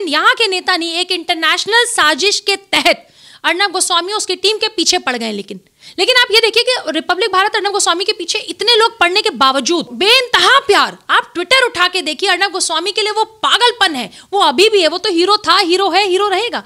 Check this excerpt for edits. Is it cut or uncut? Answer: uncut